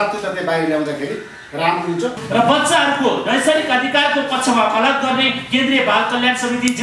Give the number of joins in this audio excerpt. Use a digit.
1